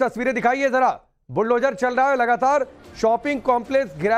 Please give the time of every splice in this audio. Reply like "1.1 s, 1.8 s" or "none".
3.2 s